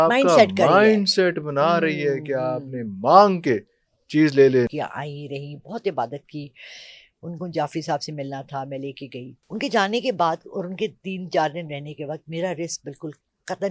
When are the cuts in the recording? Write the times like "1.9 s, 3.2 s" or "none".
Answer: 4.7 s, 9.4 s